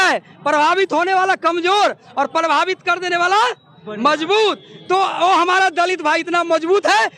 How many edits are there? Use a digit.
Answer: 0